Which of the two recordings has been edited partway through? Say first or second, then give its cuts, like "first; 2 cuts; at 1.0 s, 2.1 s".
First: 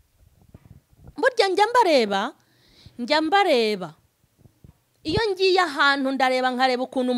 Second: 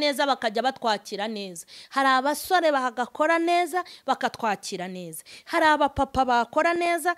first; 1 cut; at 1.1 s